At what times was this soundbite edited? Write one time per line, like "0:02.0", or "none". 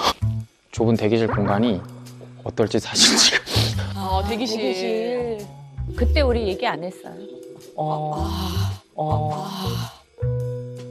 none